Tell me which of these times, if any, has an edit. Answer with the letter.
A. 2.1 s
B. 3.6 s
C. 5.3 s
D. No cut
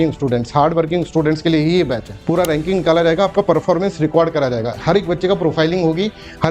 A